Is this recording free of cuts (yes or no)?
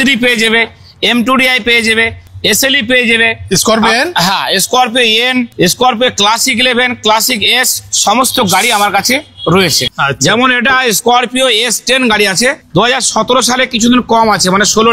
yes